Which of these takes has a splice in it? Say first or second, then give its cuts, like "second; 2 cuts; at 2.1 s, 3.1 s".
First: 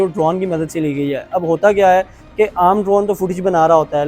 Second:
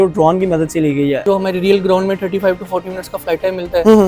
second; 1 cut; at 1.2 s